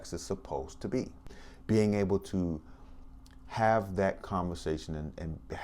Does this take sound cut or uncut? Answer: cut